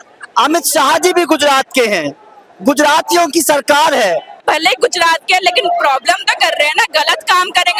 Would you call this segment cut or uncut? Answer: cut